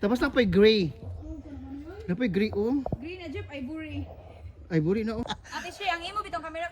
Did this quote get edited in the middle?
yes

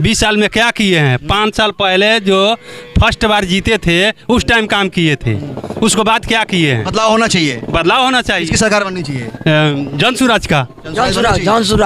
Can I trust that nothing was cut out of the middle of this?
yes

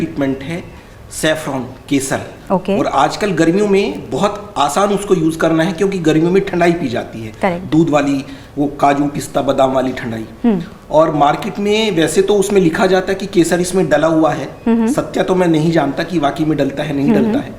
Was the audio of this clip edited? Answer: no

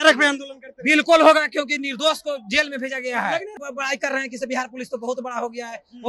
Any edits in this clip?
yes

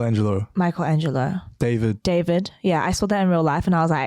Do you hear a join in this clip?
yes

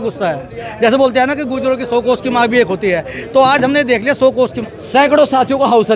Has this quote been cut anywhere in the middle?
yes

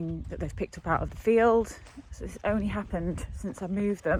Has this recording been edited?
no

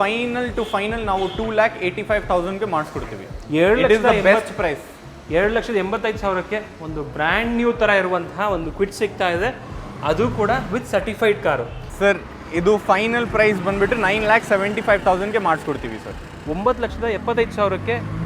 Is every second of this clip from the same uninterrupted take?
no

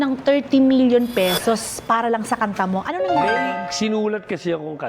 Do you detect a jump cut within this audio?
no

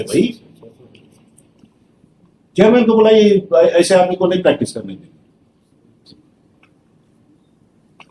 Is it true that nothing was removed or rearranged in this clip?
yes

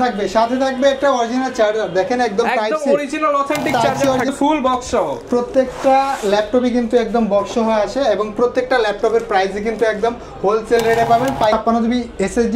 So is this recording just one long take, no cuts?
no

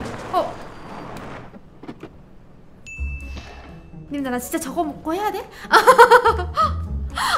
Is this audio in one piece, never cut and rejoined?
no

